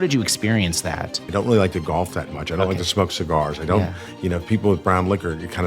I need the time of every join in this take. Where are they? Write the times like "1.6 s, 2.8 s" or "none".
1.2 s

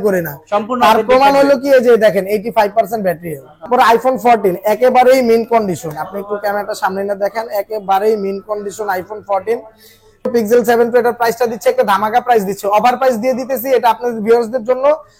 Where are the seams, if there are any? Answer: 3.7 s, 10.3 s

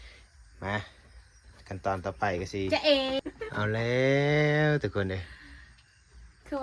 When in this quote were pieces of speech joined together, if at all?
3.2 s

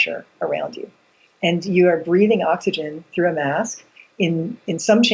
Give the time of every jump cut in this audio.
none

